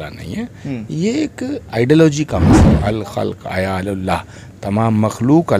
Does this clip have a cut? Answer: yes; 1 cut; at 2.7 s

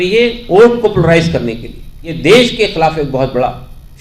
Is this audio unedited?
no; 1 cut; at 2.0 s

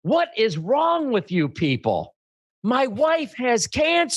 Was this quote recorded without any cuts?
yes; 0 cuts

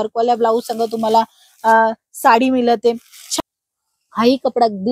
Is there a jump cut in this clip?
yes; 1 cut; at 3.3 s

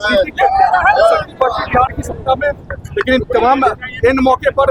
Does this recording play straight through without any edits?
yes; 0 cuts

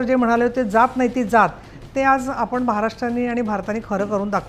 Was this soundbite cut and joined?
no; 0 cuts

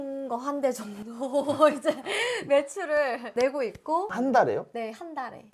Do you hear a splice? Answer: no; 0 cuts

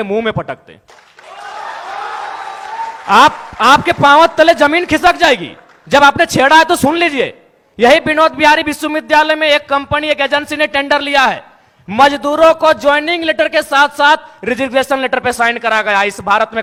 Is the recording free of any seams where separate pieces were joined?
yes; 0 cuts

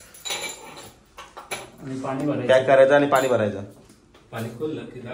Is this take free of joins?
yes; 0 cuts

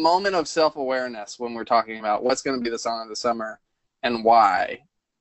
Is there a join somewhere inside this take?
no; 0 cuts

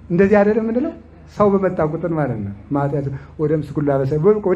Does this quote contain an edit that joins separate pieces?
no; 0 cuts

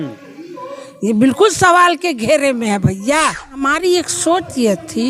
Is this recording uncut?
no; 1 cut; at 3.7 s

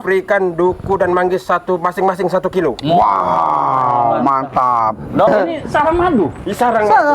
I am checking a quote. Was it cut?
yes; 1 cut; at 5.3 s

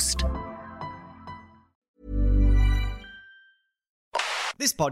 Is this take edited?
yes; 2 cuts; at 1.8 s, 4.0 s

